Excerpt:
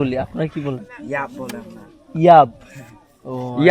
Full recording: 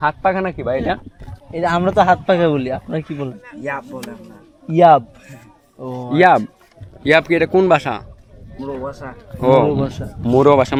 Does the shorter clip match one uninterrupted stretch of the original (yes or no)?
yes